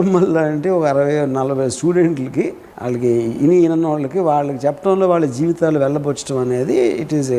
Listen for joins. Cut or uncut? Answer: uncut